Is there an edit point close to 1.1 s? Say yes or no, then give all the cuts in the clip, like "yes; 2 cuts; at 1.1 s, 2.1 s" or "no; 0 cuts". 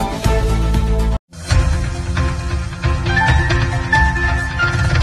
no; 0 cuts